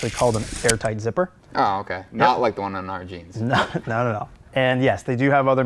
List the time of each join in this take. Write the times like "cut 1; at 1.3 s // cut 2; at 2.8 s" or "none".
cut 1; at 1.4 s // cut 2; at 4.5 s

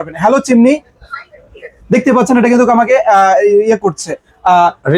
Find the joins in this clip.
none

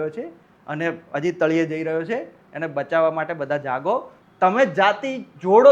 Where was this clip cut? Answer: cut 1; at 4.2 s

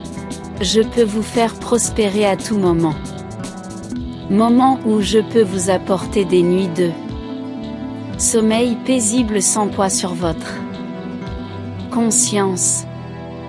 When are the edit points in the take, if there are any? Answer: cut 1; at 12.6 s

